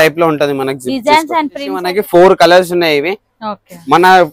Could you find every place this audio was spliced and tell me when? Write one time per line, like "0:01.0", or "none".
0:01.9